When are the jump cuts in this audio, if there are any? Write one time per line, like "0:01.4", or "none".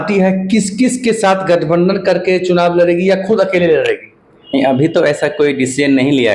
none